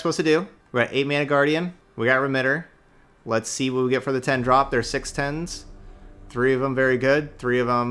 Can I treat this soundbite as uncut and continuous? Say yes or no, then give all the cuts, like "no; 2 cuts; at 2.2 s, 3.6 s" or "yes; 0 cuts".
yes; 0 cuts